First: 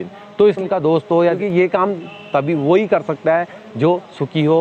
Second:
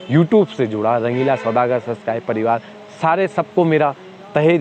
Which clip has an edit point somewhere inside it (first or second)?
first